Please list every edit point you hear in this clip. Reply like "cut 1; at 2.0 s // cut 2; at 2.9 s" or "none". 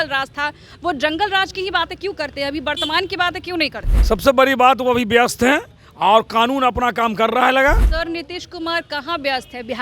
cut 1; at 3.9 s // cut 2; at 7.9 s